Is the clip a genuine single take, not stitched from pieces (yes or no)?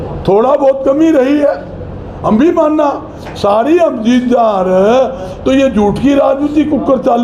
yes